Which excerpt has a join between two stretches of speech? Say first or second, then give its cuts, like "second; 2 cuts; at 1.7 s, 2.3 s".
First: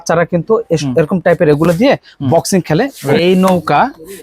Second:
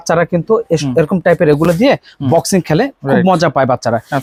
first; 1 cut; at 3.0 s